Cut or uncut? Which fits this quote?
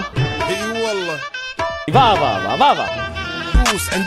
uncut